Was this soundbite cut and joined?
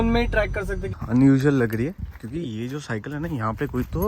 yes; 1 cut; at 0.9 s

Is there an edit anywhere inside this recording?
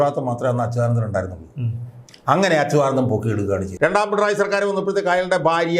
yes; 1 cut; at 3.7 s

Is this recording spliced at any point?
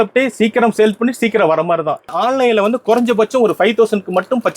yes; 1 cut; at 2.1 s

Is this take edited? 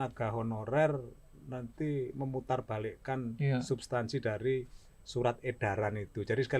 no; 0 cuts

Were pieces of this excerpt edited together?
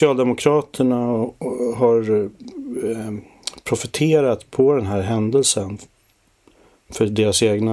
no; 0 cuts

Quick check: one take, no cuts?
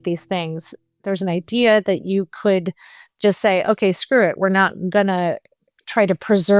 no; 1 cut; at 1.0 s

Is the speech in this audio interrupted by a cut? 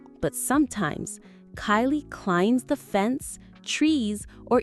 no; 0 cuts

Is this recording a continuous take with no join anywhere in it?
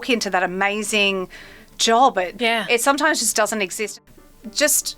no; 2 cuts; at 2.4 s, 3.8 s

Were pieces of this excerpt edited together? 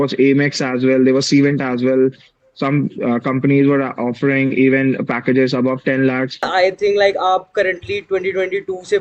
yes; 1 cut; at 6.5 s

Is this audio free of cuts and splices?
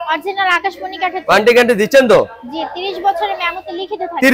yes; 0 cuts

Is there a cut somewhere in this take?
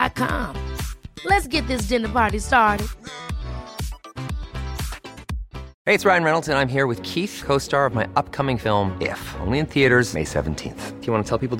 yes; 1 cut; at 5.7 s

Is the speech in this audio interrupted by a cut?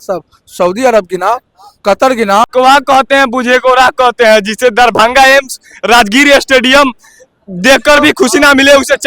yes; 1 cut; at 2.5 s

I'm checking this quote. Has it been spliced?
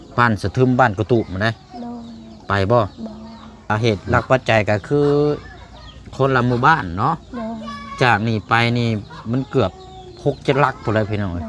yes; 1 cut; at 3.7 s

